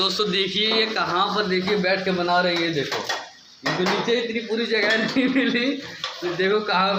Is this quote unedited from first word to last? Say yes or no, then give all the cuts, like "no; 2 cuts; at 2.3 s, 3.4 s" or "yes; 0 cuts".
yes; 0 cuts